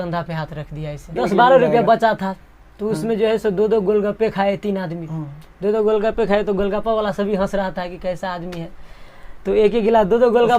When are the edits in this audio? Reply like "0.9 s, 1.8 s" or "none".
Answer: 1.1 s